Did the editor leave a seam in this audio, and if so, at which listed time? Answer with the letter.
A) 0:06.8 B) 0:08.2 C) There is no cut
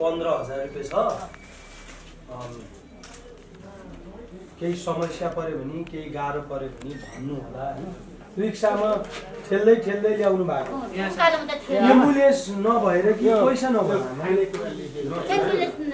B